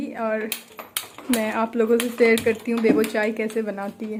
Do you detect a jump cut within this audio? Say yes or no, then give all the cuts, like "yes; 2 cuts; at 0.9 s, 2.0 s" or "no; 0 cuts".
no; 0 cuts